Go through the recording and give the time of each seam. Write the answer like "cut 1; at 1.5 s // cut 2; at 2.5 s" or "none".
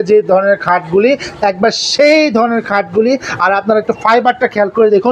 none